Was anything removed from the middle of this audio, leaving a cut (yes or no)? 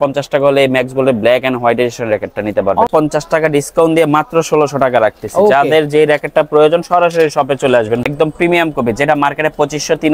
yes